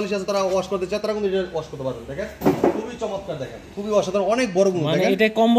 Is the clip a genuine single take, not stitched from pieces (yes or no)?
yes